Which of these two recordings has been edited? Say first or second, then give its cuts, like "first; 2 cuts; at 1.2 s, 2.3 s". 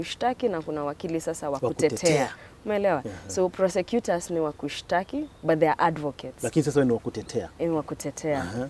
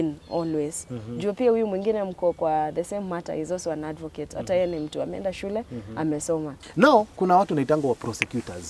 second; 1 cut; at 6.6 s